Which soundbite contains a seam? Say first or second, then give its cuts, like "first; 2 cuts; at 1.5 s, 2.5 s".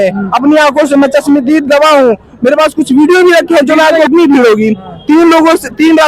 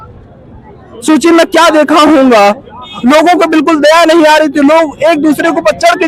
first; 1 cut; at 4.1 s